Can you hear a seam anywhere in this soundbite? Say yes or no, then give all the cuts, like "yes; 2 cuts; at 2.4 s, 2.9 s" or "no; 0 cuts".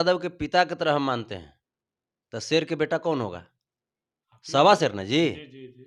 no; 0 cuts